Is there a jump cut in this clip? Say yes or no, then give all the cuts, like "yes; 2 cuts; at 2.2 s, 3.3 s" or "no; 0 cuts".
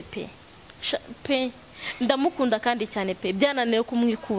no; 0 cuts